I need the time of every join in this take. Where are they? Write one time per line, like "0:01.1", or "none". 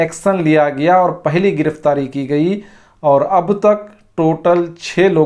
none